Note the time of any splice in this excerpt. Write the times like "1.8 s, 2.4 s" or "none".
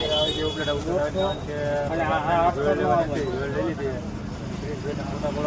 none